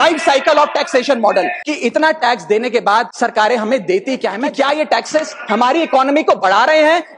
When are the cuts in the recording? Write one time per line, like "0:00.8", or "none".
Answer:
0:01.6
0:03.1
0:04.4

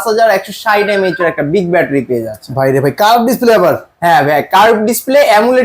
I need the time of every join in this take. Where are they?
none

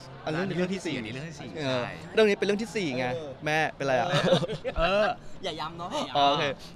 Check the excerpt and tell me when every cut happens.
none

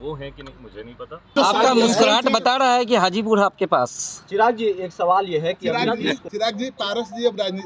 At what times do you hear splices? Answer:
0:01.3
0:06.2

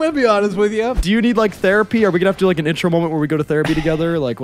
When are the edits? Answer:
0:01.0

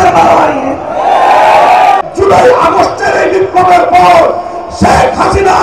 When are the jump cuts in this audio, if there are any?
0:02.0

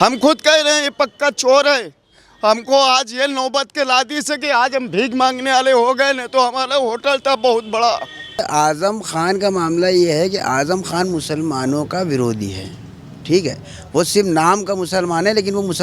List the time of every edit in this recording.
0:08.4

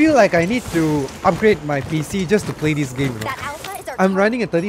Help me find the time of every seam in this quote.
none

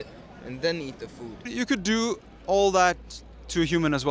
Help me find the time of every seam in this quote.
0:01.5

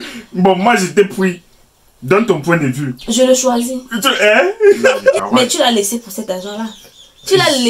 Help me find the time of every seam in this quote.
0:05.0

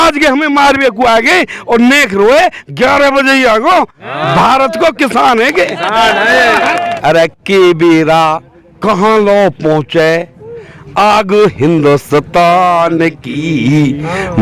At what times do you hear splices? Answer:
0:06.9

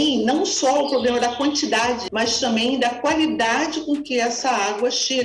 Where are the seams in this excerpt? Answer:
0:02.0

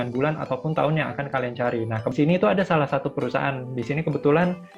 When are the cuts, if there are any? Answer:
0:02.1

